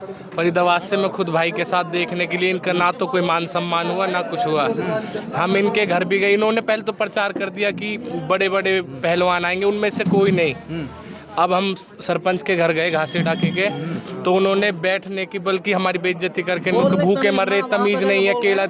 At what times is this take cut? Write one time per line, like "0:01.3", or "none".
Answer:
none